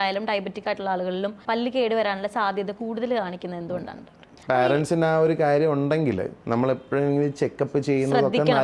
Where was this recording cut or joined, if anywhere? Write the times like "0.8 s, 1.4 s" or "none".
1.4 s, 4.3 s, 6.3 s